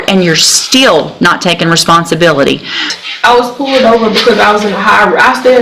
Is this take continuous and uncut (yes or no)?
no